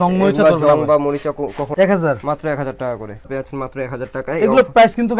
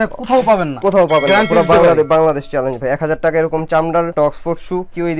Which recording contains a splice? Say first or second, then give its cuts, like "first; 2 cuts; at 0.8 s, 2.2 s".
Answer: first; 2 cuts; at 1.7 s, 3.3 s